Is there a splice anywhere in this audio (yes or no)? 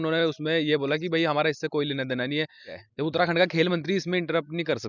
yes